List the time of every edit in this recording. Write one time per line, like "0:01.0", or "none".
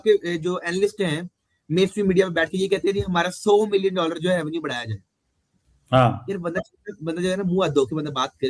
none